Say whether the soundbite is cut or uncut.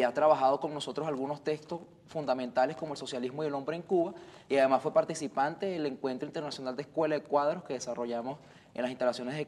cut